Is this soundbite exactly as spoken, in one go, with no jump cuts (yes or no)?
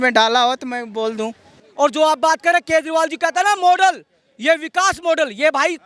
no